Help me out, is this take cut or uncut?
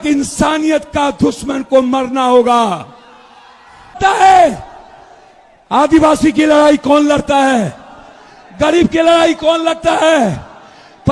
cut